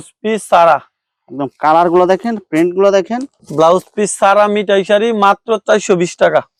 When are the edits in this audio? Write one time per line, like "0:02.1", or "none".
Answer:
none